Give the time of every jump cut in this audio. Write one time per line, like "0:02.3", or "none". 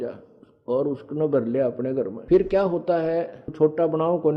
0:02.2
0:03.5